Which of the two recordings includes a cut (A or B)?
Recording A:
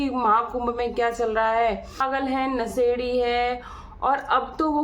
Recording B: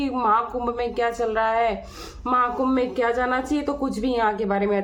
A